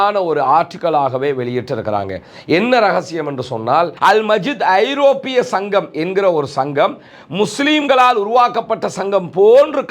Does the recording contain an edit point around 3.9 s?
yes; 1 cut; at 3.9 s

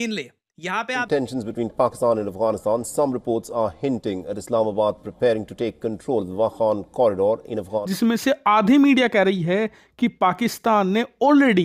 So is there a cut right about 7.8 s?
yes; 2 cuts; at 1.0 s, 7.8 s

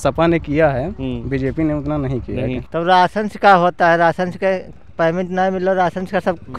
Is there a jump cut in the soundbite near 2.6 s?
yes; 1 cut; at 2.6 s

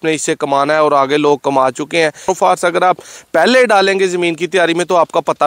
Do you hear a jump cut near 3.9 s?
no; 1 cut; at 2.3 s

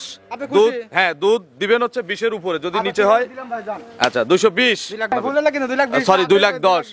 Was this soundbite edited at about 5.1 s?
yes; 1 cut; at 5.1 s

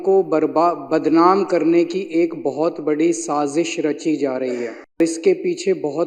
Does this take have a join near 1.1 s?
no; 1 cut; at 5.0 s

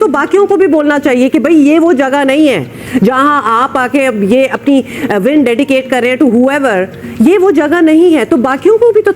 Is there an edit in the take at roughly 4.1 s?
no; 0 cuts

